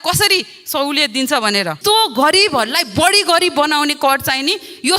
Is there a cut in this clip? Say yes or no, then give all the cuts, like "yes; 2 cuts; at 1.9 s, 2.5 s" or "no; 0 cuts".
yes; 1 cut; at 1.7 s